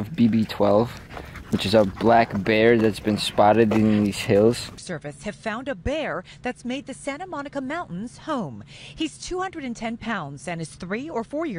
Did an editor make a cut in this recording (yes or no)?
no